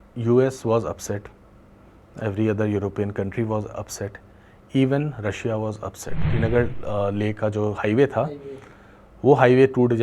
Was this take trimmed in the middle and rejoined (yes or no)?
yes